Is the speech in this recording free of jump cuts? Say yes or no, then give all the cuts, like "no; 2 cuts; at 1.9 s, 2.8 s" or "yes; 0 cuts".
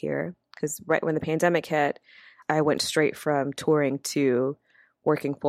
no; 1 cut; at 2.4 s